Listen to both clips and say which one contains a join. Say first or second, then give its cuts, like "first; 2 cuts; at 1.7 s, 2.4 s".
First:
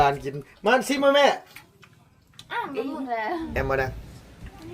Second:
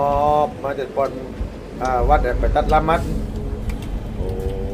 first; 1 cut; at 3.5 s